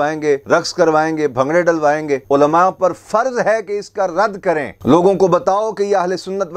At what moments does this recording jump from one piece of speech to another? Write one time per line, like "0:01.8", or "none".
0:02.2
0:04.7